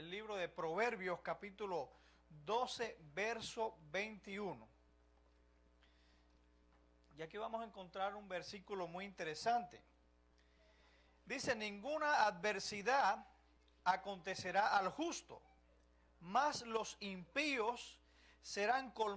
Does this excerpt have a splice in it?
no; 0 cuts

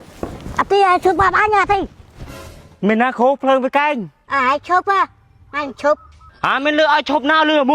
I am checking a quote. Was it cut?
yes; 1 cut; at 4.2 s

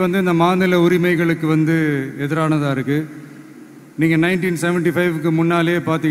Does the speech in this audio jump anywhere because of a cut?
no; 0 cuts

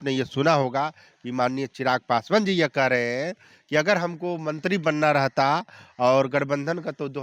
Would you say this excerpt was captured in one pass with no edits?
yes; 0 cuts

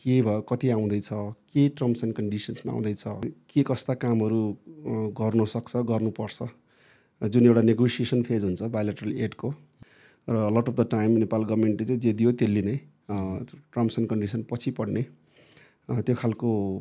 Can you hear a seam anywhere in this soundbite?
yes; 2 cuts; at 3.4 s, 9.7 s

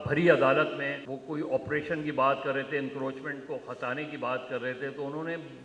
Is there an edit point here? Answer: yes; 1 cut; at 1.0 s

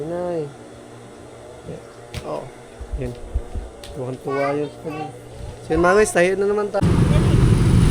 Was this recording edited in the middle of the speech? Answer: yes; 1 cut; at 6.8 s

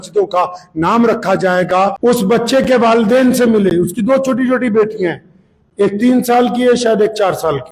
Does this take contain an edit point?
yes; 1 cut; at 2.0 s

